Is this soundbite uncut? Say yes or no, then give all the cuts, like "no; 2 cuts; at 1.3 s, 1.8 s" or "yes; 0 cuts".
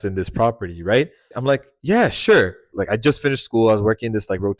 no; 2 cuts; at 1.2 s, 2.7 s